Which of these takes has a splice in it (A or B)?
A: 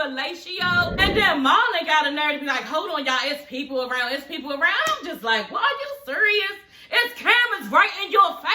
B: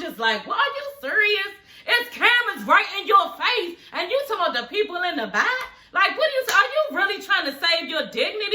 A